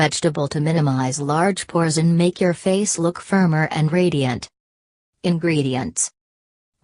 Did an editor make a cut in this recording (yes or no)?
yes